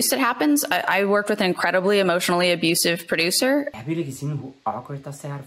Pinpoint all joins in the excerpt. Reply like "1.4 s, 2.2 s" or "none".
3.7 s